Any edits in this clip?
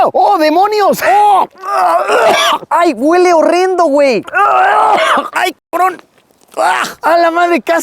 yes; 1 cut; at 1.0 s

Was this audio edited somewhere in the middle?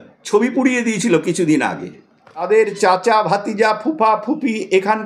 yes; 1 cut; at 2.4 s

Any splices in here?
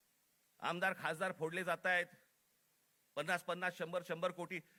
no; 0 cuts

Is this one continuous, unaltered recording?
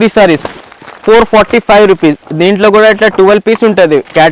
yes; 0 cuts

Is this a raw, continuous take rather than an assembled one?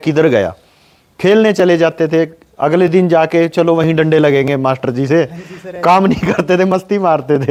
yes; 0 cuts

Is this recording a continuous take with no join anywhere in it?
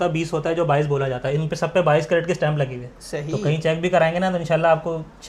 yes; 0 cuts

